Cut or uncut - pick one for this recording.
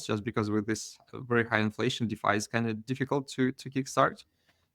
uncut